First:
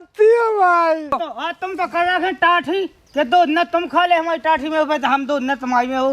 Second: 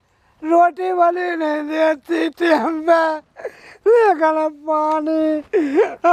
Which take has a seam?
first; 1 cut; at 1.2 s

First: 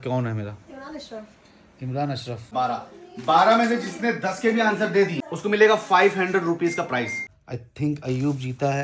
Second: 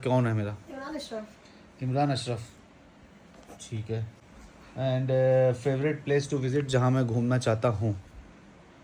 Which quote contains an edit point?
first; 3 cuts; at 2.5 s, 5.2 s, 7.2 s

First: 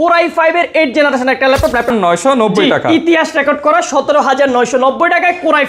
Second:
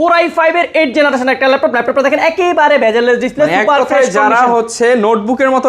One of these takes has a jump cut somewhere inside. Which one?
first; 1 cut; at 1.9 s

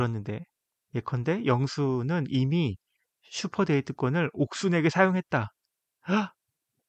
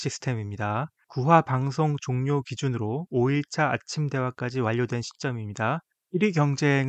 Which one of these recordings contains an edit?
second; 2 cuts; at 1.0 s, 5.9 s

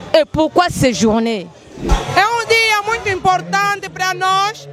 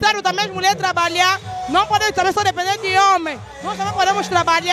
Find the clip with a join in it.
first; 1 cut; at 2.0 s

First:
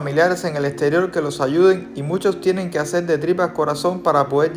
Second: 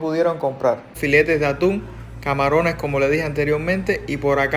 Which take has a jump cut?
second; 1 cut; at 0.9 s

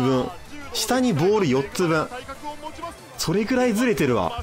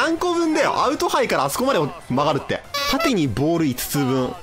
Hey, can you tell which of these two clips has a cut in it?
second; 1 cut; at 2.7 s

